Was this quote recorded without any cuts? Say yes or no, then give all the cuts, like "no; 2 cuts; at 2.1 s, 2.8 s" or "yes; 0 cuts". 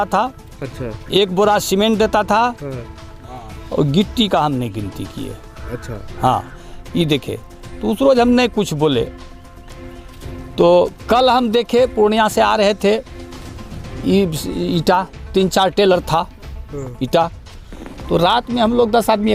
yes; 0 cuts